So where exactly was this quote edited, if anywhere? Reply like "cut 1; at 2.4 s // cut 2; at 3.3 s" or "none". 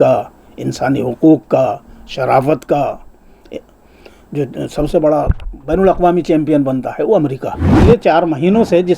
cut 1; at 7.7 s